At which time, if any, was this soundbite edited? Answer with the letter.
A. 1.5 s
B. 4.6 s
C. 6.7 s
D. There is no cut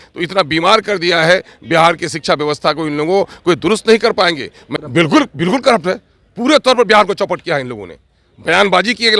B